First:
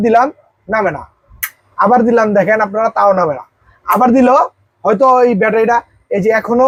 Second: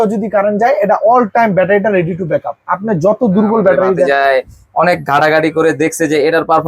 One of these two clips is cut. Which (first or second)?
second